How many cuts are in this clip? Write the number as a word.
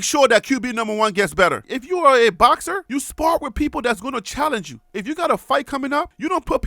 one